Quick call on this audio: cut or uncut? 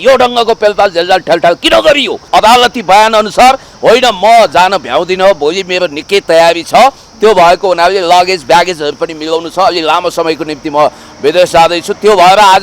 cut